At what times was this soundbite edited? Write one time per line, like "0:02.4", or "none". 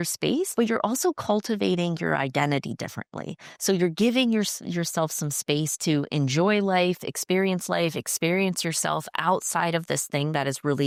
none